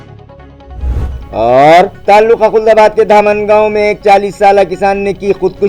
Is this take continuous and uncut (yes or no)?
no